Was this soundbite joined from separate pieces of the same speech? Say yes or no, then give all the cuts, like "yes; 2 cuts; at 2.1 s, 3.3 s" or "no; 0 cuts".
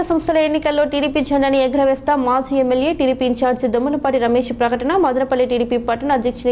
no; 0 cuts